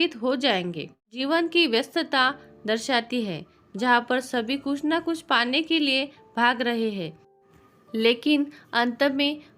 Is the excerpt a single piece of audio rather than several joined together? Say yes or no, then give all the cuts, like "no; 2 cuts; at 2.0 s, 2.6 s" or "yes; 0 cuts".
no; 1 cut; at 1.0 s